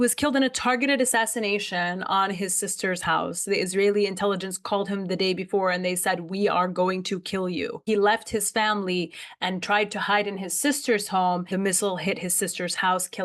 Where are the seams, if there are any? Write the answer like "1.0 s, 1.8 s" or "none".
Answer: 7.8 s, 11.5 s